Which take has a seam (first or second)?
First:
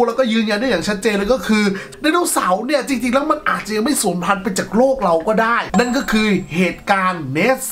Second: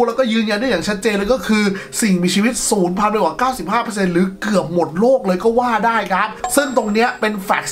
first